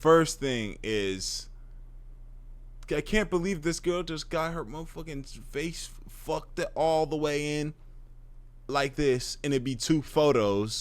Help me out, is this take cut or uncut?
uncut